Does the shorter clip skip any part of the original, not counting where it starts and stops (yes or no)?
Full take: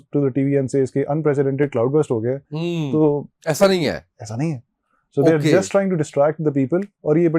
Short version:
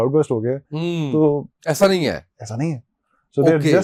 no